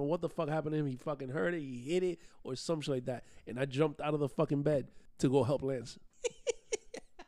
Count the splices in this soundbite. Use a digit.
2